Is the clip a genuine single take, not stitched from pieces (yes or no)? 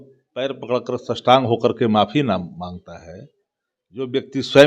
yes